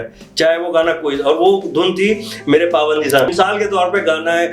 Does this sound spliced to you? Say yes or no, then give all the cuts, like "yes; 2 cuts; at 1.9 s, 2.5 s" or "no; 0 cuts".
yes; 1 cut; at 3.3 s